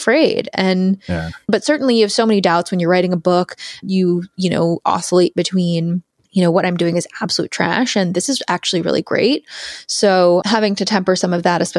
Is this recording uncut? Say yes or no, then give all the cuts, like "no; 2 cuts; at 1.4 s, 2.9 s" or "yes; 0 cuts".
no; 4 cuts; at 1.5 s, 3.8 s, 6.1 s, 10.4 s